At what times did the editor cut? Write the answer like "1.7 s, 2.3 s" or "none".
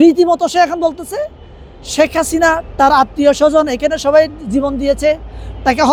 none